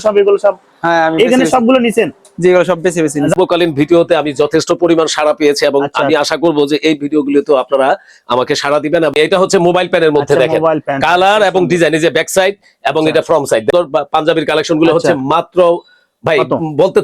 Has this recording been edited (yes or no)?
yes